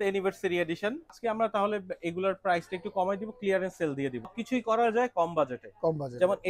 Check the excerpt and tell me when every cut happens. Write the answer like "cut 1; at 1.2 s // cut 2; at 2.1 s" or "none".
cut 1; at 1.2 s // cut 2; at 4.4 s